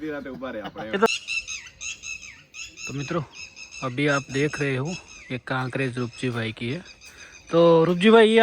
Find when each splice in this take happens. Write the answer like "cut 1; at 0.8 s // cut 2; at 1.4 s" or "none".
cut 1; at 1.1 s